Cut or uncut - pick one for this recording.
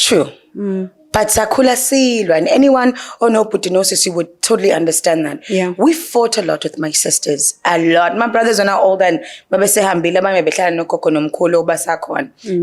uncut